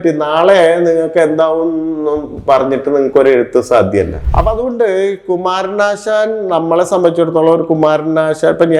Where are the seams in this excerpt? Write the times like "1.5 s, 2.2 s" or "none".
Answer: 4.2 s

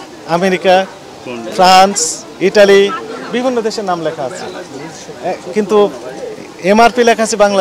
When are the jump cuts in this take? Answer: none

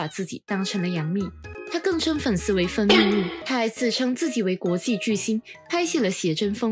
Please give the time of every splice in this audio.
1.5 s, 3.4 s

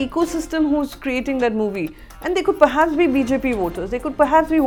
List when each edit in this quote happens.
none

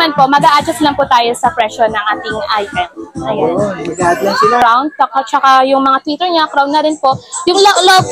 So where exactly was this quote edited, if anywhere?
4.6 s

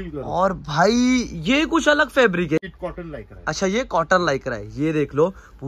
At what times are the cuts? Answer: 2.6 s

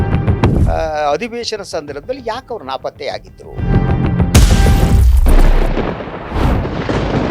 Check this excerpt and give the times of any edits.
4.8 s

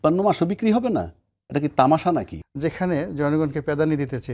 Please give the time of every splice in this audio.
2.4 s

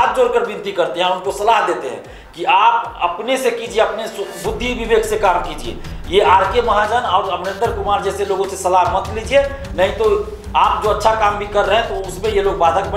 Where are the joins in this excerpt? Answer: none

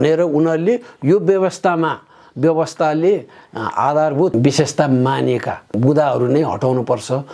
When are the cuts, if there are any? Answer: 4.4 s, 5.8 s

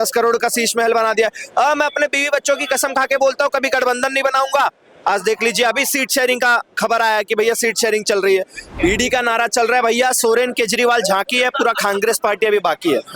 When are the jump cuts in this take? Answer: 8.7 s

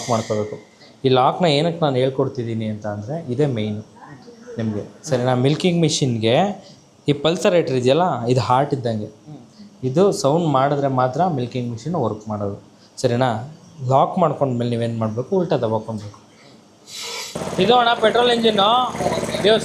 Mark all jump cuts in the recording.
17.3 s

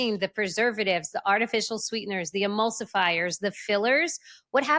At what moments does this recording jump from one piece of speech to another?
none

